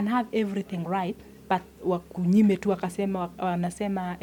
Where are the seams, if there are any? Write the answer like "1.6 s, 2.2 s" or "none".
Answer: none